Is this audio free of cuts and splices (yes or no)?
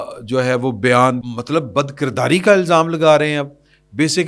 no